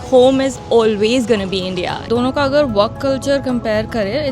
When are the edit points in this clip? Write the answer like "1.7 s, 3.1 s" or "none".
2.0 s